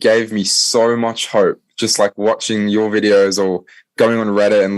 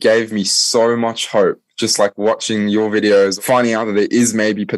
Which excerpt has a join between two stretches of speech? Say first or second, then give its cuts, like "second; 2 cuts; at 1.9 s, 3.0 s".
second; 1 cut; at 3.3 s